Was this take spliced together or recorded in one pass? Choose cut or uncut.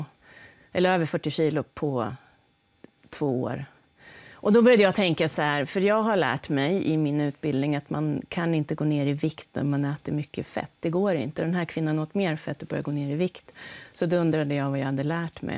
cut